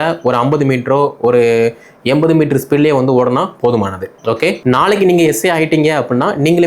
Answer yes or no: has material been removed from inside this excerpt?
yes